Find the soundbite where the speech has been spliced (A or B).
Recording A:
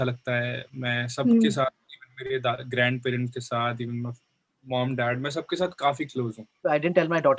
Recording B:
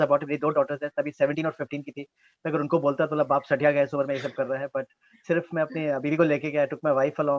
A